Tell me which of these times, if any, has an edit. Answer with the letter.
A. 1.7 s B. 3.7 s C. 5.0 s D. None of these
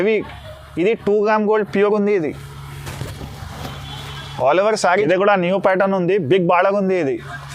C